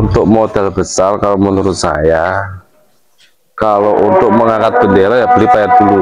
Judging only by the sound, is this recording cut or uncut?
uncut